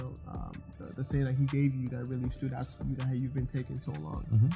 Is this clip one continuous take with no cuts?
yes; 0 cuts

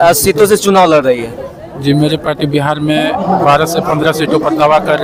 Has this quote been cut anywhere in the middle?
no; 0 cuts

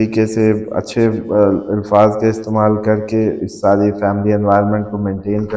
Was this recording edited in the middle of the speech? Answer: no; 0 cuts

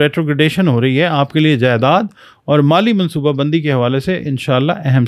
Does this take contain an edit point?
no; 0 cuts

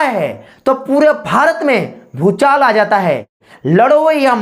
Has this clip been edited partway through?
yes; 1 cut; at 3.4 s

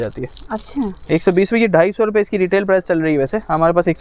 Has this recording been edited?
no; 0 cuts

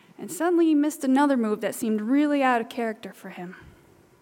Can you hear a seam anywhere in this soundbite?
no; 0 cuts

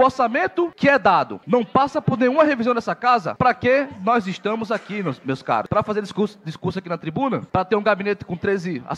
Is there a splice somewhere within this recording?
no; 0 cuts

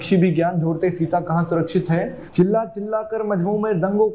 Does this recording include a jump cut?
yes; 1 cut; at 2.2 s

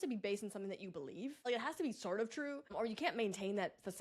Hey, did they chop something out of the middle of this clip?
yes; 2 cuts; at 1.4 s, 2.7 s

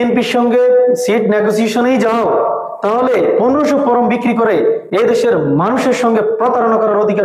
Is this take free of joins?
yes; 0 cuts

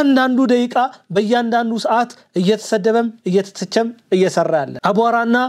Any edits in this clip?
no; 0 cuts

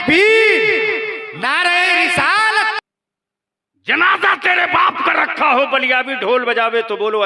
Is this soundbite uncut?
no; 1 cut; at 2.8 s

